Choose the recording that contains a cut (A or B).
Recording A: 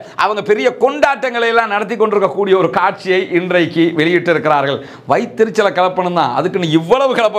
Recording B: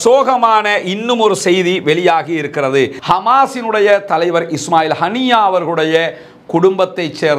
B